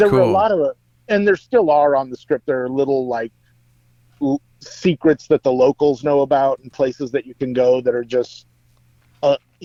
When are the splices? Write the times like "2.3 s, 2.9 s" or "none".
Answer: none